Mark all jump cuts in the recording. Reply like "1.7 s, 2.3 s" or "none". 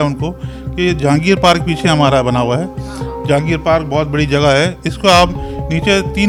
none